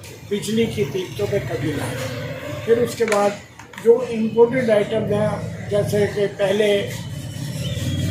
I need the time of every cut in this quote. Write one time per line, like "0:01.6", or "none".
none